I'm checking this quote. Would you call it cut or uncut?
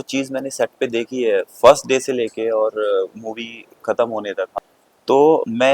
cut